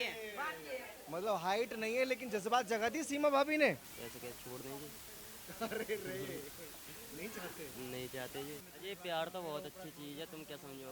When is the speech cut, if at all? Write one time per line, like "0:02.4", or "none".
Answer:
0:00.9
0:03.9
0:08.7